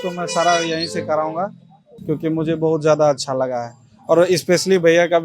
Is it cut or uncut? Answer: uncut